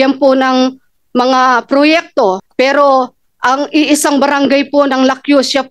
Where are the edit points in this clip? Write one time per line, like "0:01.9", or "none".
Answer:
0:02.4